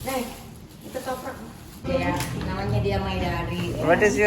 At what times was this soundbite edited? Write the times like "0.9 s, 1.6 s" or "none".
2.0 s